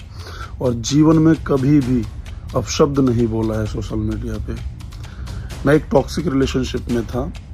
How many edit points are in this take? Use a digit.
0